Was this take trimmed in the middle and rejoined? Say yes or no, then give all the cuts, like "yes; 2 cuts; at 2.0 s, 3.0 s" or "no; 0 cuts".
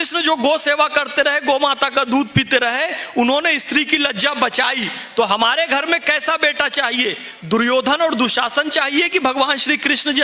no; 0 cuts